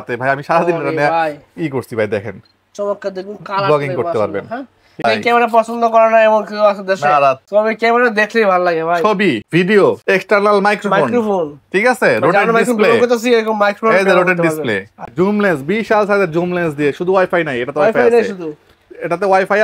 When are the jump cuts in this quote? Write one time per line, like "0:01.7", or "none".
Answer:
0:05.0
0:15.1